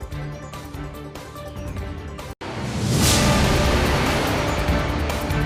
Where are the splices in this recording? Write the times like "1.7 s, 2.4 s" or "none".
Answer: none